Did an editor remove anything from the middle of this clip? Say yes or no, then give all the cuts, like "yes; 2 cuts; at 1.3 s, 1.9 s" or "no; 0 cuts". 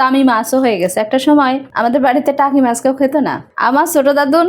yes; 2 cuts; at 1.7 s, 3.5 s